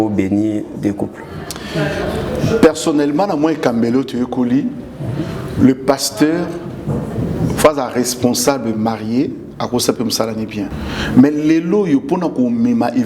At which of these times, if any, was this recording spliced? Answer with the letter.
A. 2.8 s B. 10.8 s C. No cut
B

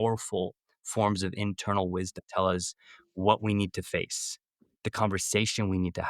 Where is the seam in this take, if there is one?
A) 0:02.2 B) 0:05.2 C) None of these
A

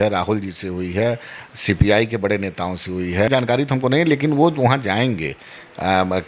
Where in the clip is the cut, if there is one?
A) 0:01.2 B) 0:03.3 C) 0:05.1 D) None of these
B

